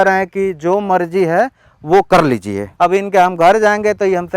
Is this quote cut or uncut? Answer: cut